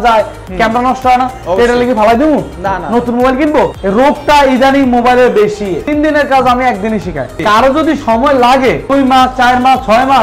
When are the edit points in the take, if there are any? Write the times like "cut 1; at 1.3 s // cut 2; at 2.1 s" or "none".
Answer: cut 1; at 5.8 s // cut 2; at 8.8 s